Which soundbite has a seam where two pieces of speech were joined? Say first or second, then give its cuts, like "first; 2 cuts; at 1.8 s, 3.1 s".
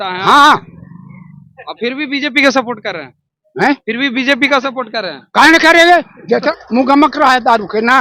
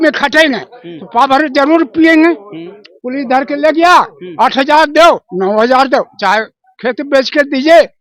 first; 1 cut; at 6.5 s